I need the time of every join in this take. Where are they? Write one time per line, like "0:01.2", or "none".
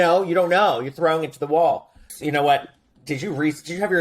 0:02.0